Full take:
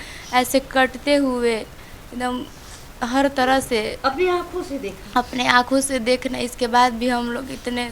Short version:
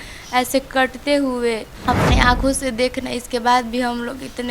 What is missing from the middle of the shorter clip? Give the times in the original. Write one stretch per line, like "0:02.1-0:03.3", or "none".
0:01.7-0:05.0